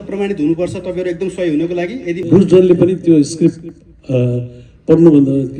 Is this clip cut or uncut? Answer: cut